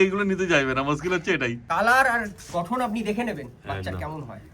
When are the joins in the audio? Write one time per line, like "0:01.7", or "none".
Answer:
0:01.6